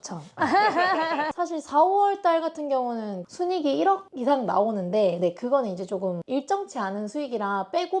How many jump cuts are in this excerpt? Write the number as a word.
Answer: one